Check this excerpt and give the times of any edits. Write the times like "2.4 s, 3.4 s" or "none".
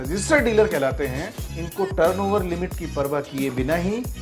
1.3 s